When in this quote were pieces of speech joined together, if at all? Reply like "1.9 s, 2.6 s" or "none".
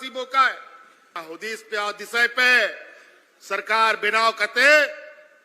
1.2 s